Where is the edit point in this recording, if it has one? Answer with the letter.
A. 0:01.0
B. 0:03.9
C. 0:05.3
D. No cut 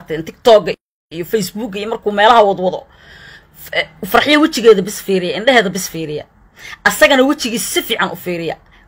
D